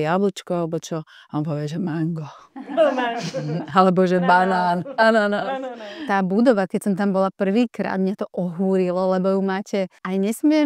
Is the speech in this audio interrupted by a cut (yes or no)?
yes